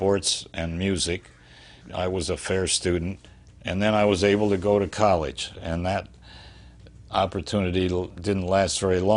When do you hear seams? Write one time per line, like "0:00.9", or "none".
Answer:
0:01.8
0:03.2
0:05.6